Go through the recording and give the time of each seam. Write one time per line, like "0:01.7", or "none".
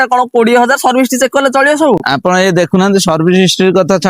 none